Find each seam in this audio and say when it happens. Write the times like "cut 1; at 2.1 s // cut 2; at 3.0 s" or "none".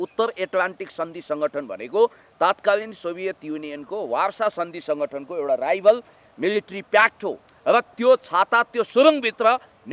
none

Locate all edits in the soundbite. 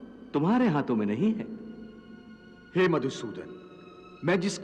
none

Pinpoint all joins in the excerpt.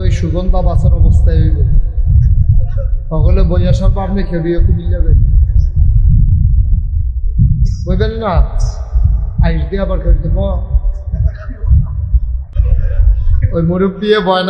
cut 1; at 12.5 s

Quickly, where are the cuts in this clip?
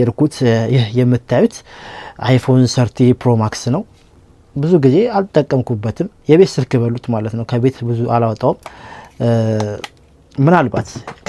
none

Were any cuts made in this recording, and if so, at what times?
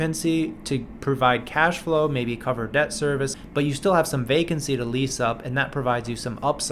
cut 1; at 3.4 s

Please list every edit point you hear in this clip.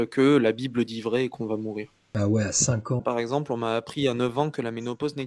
cut 1; at 2.0 s // cut 2; at 3.0 s

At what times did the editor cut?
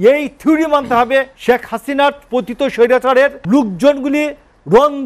cut 1; at 1.3 s // cut 2; at 3.4 s

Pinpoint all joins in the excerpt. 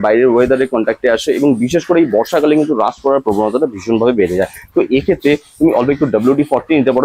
none

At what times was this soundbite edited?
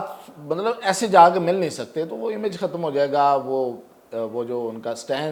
none

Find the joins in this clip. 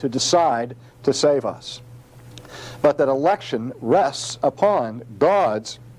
cut 1; at 4.1 s

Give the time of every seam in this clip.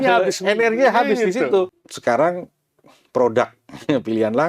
cut 1; at 1.9 s

